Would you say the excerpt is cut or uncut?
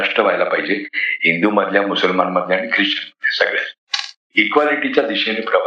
uncut